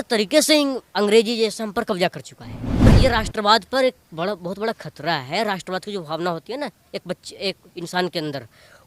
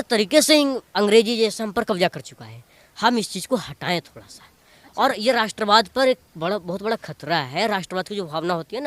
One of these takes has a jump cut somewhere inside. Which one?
first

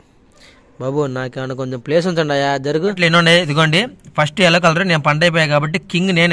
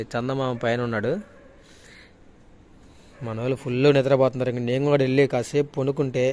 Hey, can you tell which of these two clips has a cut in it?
first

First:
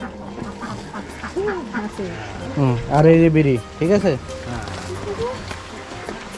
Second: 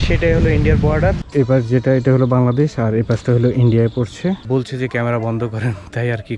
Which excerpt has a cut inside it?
second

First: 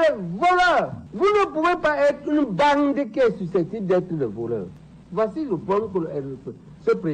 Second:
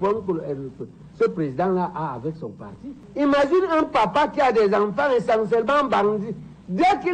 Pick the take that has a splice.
first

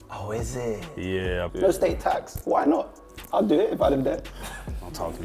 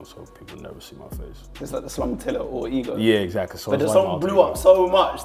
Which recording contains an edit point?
first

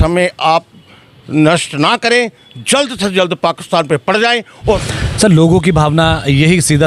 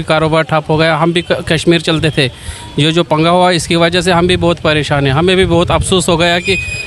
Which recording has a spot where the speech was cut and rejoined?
first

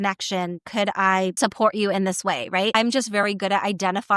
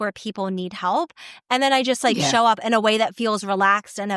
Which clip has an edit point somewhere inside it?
first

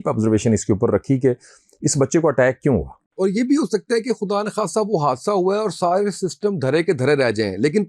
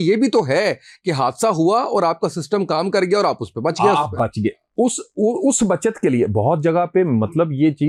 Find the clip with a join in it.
first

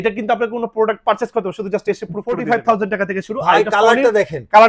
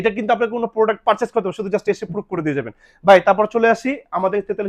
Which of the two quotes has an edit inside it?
first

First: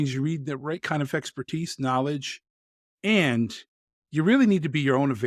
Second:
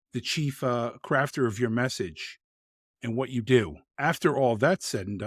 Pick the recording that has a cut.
second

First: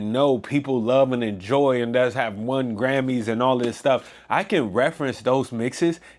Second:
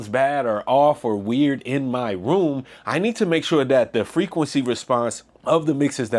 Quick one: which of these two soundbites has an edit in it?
second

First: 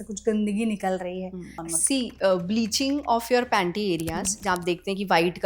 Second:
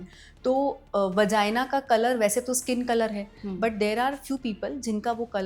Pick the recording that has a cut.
first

